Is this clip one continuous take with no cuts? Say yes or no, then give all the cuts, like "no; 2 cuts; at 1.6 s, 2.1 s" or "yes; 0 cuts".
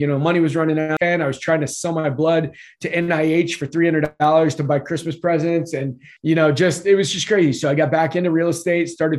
no; 2 cuts; at 0.9 s, 6.0 s